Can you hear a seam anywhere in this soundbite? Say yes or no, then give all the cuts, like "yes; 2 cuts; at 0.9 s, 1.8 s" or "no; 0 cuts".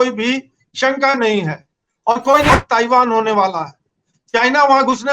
yes; 1 cut; at 2.5 s